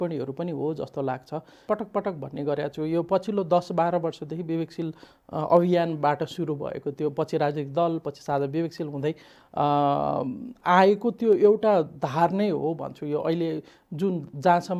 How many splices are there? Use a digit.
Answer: 1